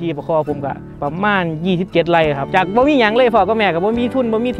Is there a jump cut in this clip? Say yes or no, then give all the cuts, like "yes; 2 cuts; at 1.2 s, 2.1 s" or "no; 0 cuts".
yes; 2 cuts; at 0.9 s, 2.5 s